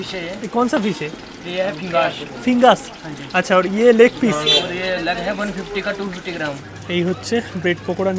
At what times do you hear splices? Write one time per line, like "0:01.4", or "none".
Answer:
0:06.8